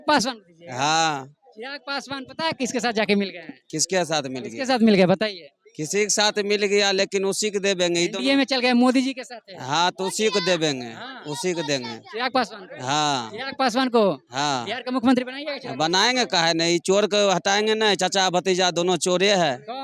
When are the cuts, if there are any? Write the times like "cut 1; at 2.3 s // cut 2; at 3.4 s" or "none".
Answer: none